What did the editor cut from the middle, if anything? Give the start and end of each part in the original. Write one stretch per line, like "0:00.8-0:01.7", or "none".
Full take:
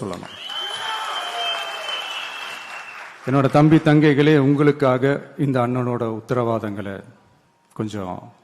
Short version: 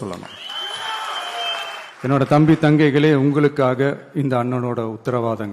0:01.8-0:03.0